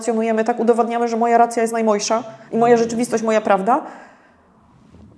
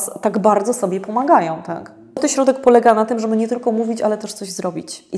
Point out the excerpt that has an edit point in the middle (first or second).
second